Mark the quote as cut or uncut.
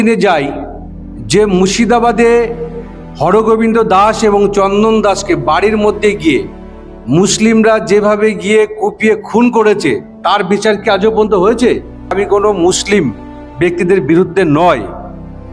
cut